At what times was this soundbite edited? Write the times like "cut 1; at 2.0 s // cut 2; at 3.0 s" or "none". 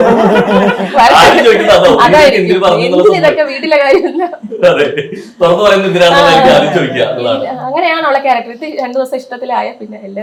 none